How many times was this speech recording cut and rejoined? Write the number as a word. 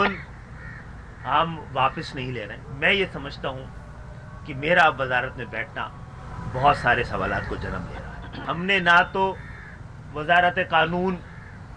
two